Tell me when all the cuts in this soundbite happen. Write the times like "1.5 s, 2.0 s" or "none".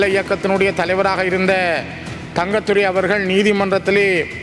none